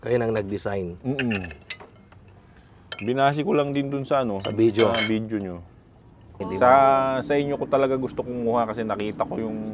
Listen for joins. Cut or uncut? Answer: cut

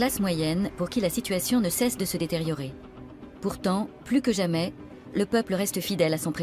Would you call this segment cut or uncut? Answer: uncut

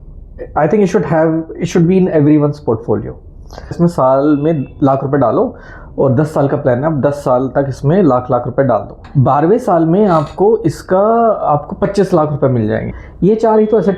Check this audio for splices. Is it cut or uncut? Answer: cut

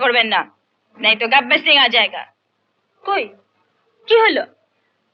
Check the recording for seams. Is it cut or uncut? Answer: uncut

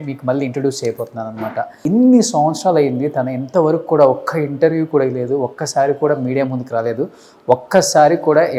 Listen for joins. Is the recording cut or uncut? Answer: cut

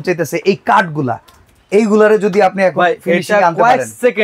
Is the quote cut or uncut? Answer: uncut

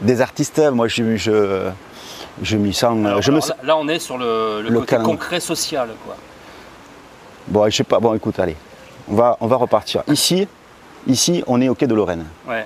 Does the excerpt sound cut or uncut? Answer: cut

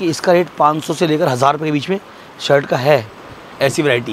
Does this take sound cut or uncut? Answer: uncut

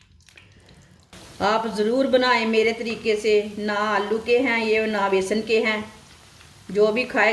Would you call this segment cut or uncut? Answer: cut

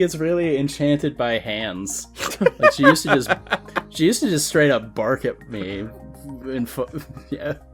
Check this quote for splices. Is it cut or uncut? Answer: uncut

